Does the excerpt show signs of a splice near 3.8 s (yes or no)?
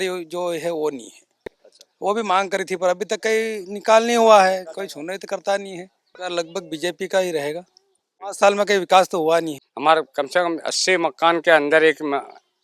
no